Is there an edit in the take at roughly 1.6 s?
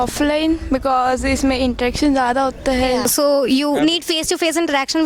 no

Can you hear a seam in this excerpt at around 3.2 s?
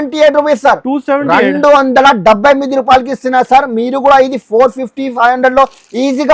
no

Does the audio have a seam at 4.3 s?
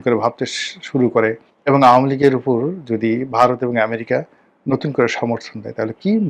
no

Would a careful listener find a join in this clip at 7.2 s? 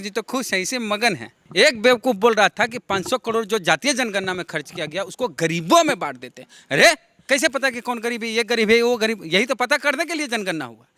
yes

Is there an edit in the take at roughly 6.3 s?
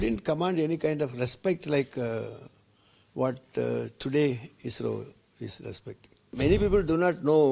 yes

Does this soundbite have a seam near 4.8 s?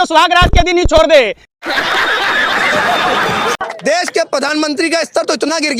no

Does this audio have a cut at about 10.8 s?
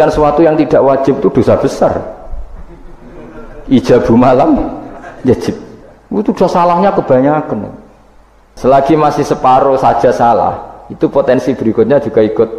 no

